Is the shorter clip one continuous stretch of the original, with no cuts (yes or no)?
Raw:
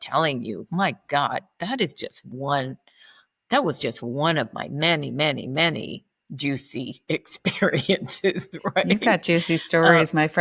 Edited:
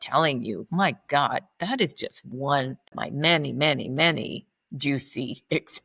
no